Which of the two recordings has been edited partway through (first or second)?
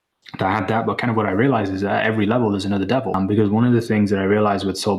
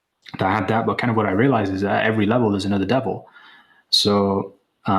first